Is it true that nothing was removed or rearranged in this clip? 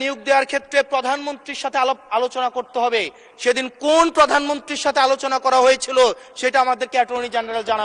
yes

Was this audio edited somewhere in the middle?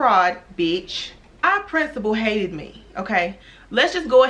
yes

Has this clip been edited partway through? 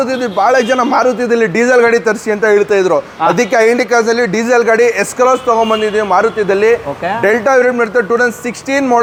no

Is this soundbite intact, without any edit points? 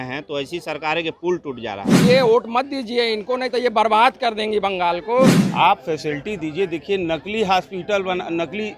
no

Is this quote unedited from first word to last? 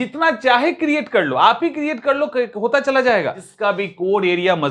no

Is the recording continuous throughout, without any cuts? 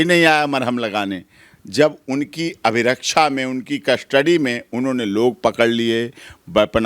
yes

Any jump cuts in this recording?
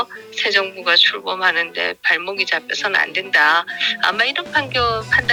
no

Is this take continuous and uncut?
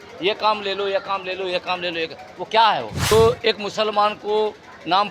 no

